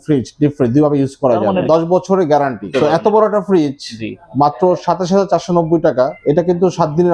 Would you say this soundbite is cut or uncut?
cut